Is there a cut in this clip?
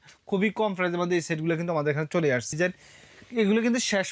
yes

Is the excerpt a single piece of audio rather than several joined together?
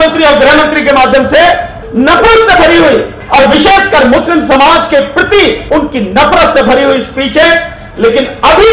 no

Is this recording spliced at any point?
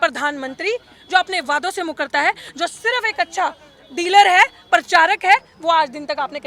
no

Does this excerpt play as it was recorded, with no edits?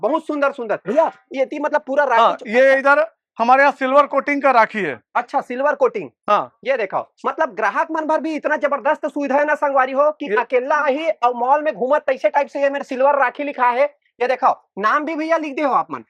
yes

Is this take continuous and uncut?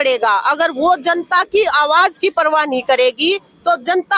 yes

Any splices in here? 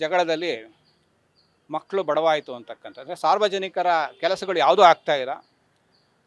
no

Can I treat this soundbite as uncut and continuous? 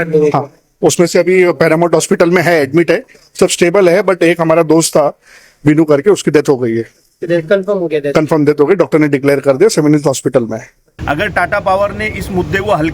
no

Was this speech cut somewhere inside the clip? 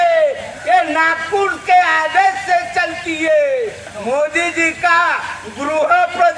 yes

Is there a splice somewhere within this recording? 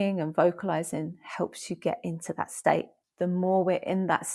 yes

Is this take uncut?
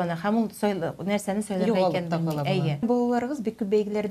no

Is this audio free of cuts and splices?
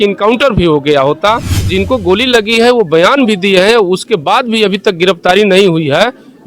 no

